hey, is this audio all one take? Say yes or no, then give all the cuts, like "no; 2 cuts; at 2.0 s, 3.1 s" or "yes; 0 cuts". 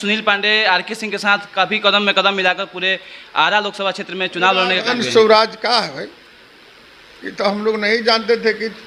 no; 1 cut; at 4.9 s